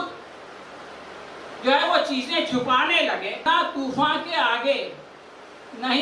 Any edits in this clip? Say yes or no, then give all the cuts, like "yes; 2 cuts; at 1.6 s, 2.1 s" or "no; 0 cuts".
yes; 1 cut; at 3.4 s